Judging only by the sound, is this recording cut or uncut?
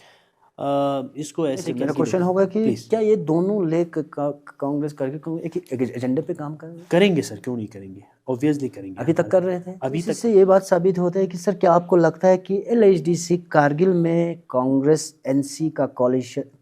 cut